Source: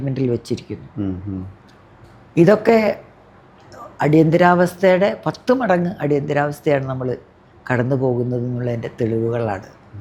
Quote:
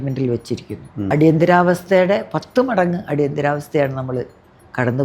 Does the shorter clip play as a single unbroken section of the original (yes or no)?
no